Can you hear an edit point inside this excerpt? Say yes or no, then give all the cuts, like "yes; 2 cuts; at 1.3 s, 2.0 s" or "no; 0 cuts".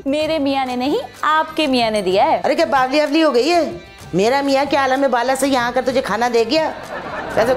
no; 0 cuts